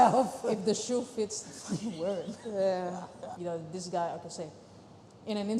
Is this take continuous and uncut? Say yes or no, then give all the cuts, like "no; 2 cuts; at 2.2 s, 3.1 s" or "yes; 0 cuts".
no; 1 cut; at 3.3 s